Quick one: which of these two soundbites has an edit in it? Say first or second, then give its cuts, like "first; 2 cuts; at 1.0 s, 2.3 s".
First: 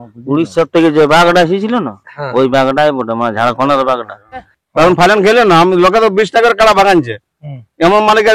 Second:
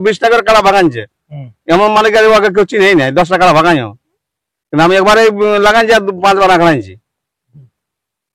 first; 1 cut; at 4.6 s